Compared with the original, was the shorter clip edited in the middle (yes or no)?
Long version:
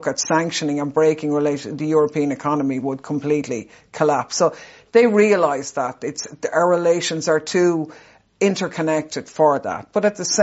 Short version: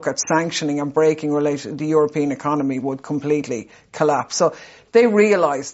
no